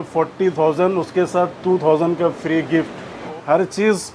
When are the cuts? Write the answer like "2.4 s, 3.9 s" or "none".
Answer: 3.2 s